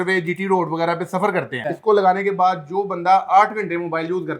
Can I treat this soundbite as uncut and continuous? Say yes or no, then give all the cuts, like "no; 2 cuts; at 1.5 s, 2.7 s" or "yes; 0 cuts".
no; 1 cut; at 1.6 s